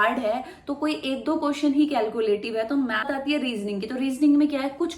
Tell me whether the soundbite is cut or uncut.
cut